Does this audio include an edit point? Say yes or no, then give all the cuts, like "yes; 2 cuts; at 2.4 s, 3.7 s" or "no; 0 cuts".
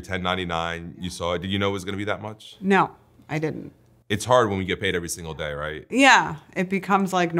no; 0 cuts